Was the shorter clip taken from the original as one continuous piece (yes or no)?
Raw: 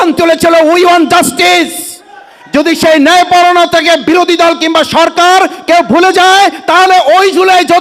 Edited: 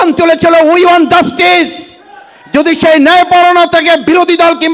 yes